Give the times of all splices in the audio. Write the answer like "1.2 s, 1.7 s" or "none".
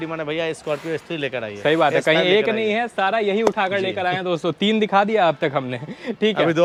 none